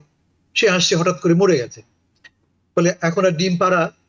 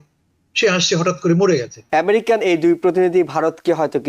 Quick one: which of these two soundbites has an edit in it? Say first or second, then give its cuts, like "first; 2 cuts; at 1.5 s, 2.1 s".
second; 1 cut; at 1.8 s